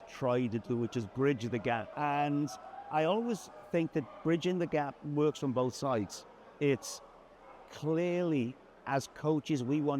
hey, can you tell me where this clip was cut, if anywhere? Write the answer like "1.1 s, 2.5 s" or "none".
1.9 s